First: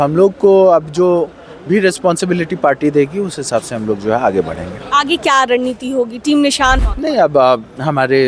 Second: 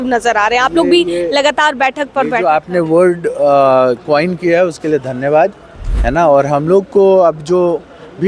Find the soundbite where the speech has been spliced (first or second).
first